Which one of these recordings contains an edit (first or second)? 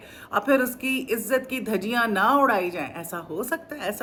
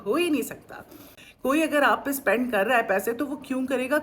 second